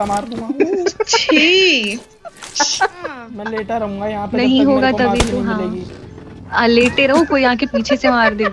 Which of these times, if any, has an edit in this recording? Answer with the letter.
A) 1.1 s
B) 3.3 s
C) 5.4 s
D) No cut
B